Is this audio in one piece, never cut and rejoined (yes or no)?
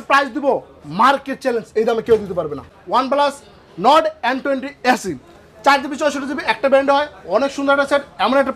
no